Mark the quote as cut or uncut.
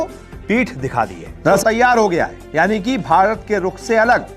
cut